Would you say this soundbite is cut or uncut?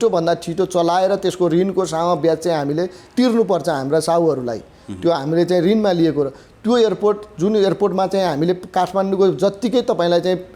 uncut